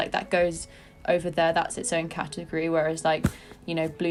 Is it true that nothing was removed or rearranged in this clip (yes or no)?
yes